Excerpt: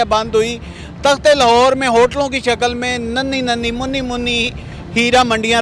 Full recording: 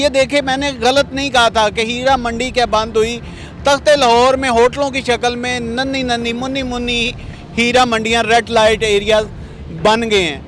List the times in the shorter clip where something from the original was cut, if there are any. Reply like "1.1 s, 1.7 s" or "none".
none